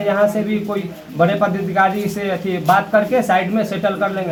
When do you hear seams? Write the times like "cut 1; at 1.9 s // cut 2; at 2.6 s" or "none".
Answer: none